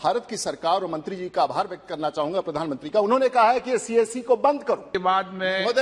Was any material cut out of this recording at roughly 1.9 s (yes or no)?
no